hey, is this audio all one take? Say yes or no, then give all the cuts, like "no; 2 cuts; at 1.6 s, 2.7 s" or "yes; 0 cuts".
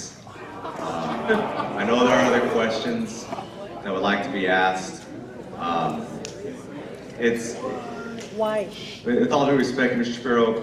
yes; 0 cuts